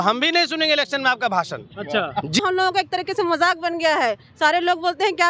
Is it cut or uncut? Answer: cut